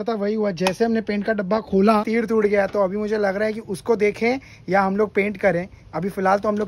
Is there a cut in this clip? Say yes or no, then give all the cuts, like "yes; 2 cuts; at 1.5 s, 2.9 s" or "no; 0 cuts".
no; 0 cuts